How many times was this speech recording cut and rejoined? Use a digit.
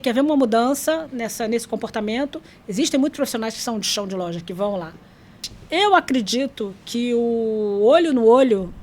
1